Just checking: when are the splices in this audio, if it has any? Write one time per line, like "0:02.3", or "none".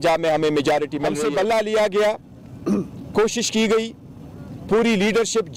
0:01.1